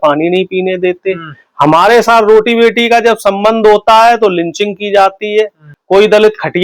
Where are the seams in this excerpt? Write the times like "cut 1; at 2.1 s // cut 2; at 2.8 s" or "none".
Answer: cut 1; at 5.7 s